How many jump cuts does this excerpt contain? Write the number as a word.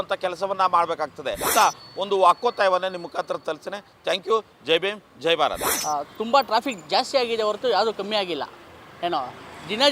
two